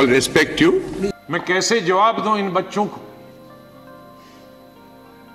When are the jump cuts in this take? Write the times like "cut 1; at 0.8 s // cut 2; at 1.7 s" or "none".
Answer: cut 1; at 1.1 s